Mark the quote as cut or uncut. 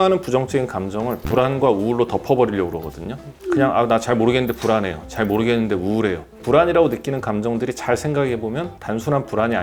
uncut